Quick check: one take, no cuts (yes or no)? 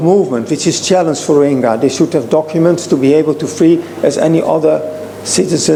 yes